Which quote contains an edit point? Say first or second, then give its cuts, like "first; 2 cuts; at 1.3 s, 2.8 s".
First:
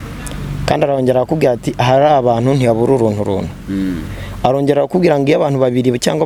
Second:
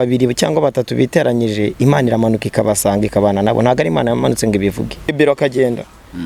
second; 1 cut; at 5.1 s